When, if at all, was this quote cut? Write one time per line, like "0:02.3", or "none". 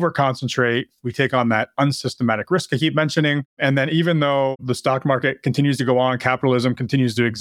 0:03.5
0:04.6